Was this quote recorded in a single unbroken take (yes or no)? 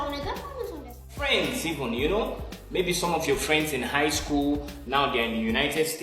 no